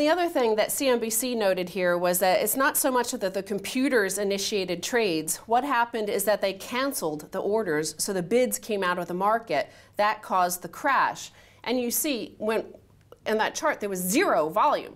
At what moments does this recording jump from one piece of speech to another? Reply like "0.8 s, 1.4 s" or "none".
13.8 s